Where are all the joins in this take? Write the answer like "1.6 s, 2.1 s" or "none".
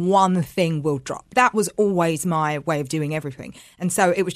1.3 s